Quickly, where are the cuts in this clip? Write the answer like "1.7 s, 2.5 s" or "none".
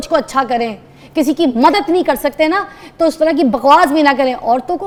none